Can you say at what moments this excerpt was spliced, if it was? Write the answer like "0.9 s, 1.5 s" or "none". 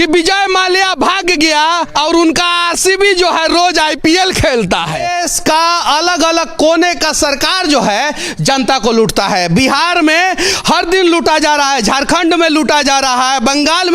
5.1 s